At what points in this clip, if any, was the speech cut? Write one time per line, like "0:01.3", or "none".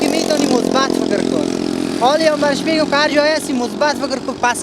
none

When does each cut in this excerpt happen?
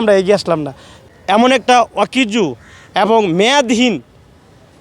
0:01.0

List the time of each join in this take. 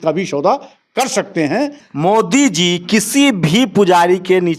0:01.8

